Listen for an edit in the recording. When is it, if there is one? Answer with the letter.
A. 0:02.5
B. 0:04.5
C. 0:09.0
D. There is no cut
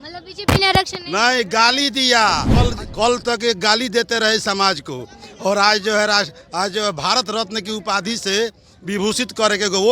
A